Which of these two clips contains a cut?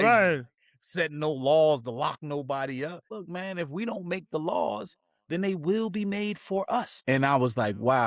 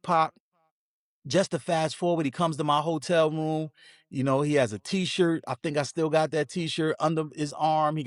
first; 2 cuts; at 3.1 s, 6.9 s

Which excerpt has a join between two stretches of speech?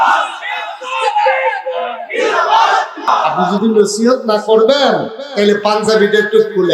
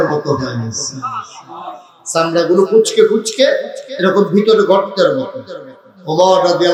first; 1 cut; at 3.4 s

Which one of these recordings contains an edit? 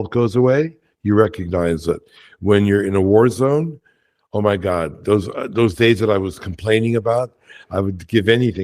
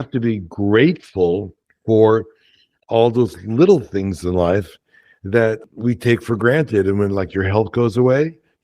second; 1 cut; at 5.6 s

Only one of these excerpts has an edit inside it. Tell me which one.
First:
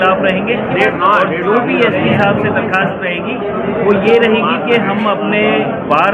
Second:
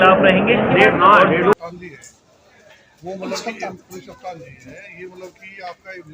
second; 1 cut; at 1.5 s

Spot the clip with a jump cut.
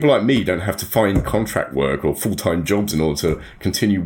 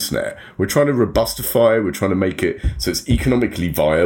first; 1 cut; at 2.9 s

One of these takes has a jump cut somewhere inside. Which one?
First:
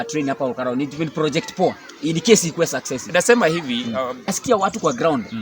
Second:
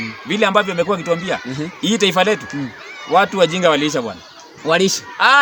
first; 1 cut; at 4.3 s

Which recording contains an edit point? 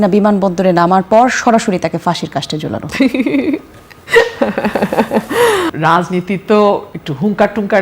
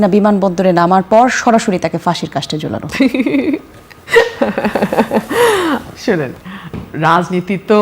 first; 1 cut; at 5.7 s

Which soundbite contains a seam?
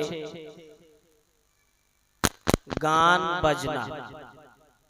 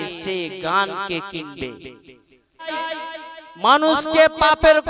second; 1 cut; at 2.7 s

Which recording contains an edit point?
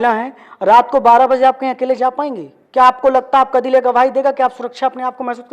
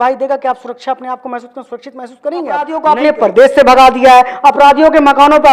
second; 1 cut; at 2.7 s

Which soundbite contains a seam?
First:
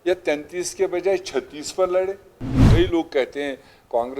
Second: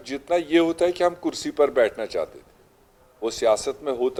first; 1 cut; at 2.5 s

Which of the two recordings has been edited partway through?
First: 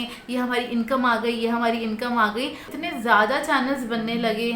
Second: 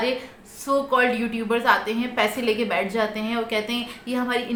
first; 1 cut; at 2.7 s

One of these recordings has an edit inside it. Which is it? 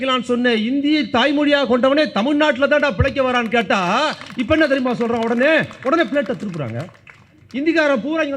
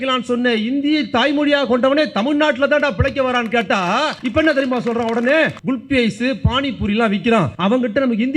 second; 3 cuts; at 4.2 s, 5.6 s, 7.5 s

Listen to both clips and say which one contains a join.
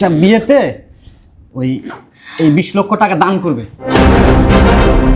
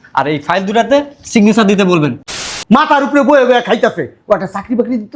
second; 1 cut; at 2.2 s

